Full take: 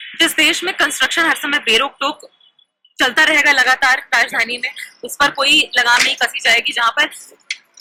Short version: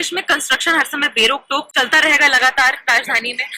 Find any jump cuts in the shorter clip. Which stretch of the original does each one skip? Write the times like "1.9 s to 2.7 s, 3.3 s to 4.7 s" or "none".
2.2 s to 2.9 s